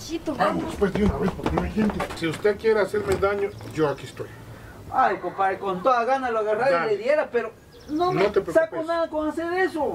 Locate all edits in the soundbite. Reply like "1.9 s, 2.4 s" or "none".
2.1 s